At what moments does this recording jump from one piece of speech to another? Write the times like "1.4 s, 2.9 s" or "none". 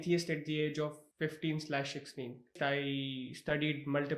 1.0 s, 2.5 s